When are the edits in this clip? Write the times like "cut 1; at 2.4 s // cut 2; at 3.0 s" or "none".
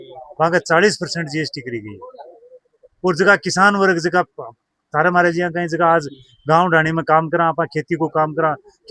none